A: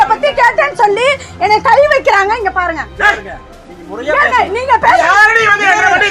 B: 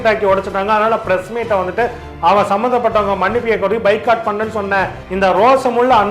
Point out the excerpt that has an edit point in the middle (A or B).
B